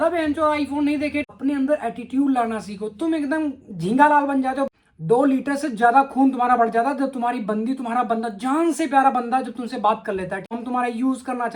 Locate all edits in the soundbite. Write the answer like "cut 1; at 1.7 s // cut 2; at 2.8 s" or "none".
cut 1; at 1.2 s // cut 2; at 4.7 s // cut 3; at 10.5 s